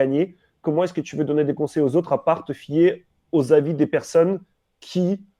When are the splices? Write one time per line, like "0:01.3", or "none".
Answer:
none

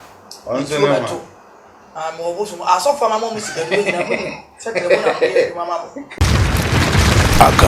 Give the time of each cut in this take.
0:06.1

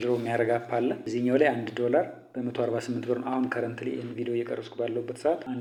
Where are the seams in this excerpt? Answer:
none

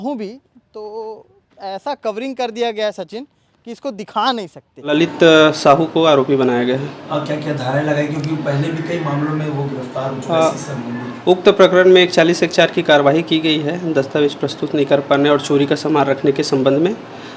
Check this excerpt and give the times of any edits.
0:04.9

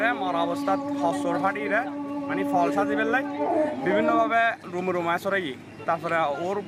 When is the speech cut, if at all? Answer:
none

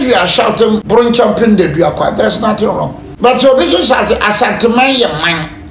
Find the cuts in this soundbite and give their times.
0:00.8
0:03.0

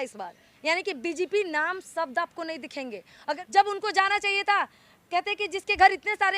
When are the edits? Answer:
0:03.4

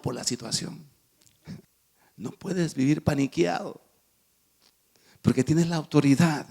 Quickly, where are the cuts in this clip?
0:01.6

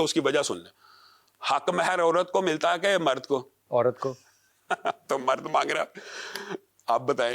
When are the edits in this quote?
none

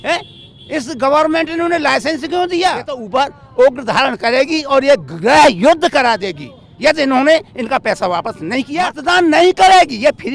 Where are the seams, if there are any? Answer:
0:03.0
0:09.0

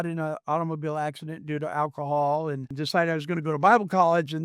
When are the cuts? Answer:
0:02.7

